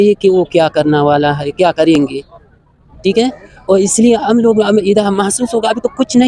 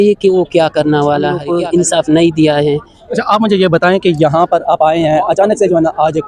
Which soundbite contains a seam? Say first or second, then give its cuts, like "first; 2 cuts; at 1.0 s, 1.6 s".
second; 1 cut; at 1.4 s